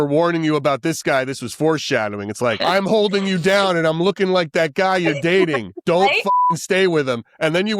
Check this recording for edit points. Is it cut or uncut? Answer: cut